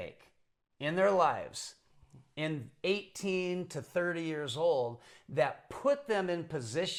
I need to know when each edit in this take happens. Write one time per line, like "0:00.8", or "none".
none